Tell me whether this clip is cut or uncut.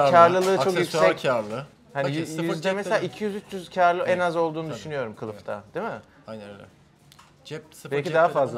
uncut